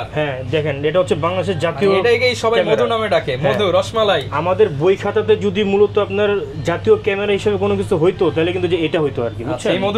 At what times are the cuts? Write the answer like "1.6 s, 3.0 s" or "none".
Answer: none